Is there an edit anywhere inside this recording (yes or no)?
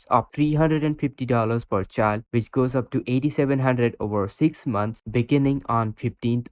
no